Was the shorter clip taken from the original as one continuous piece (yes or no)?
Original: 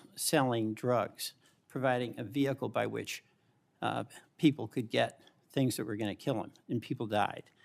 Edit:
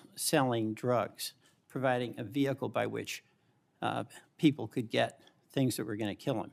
yes